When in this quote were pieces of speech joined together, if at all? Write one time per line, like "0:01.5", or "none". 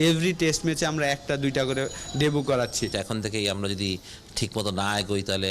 0:02.9